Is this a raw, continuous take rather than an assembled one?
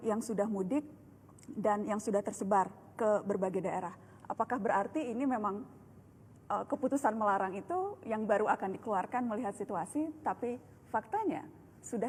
yes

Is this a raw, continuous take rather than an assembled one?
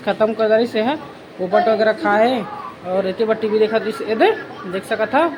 yes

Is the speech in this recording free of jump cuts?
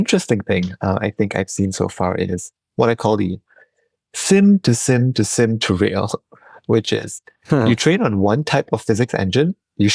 yes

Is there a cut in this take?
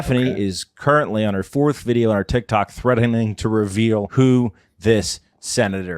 yes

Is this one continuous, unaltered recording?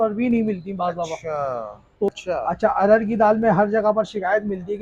no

